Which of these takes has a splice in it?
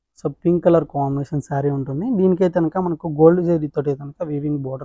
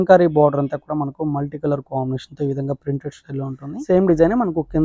second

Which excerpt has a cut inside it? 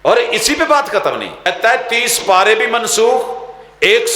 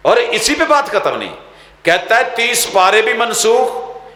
first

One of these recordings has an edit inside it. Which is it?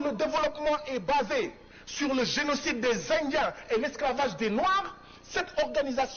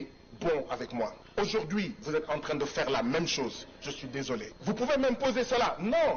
second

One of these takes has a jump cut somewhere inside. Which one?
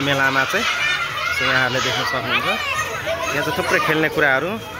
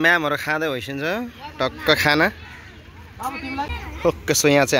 second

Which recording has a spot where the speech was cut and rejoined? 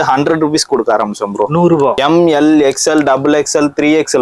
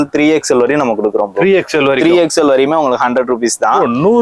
first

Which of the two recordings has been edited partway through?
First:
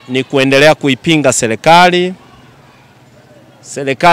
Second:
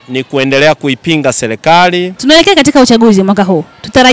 second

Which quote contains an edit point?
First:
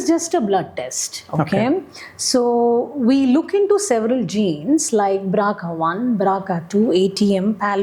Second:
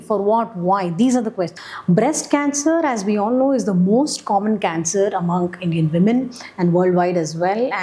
second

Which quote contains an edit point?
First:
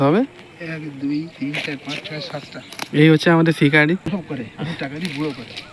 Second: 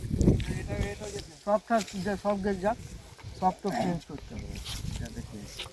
first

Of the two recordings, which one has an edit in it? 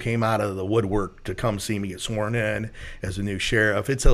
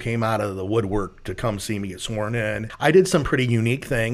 second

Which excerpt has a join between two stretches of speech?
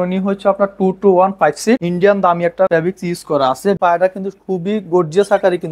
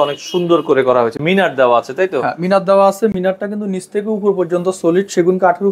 first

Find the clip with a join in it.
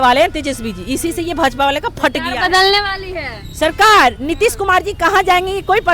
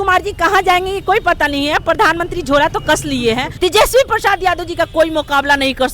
second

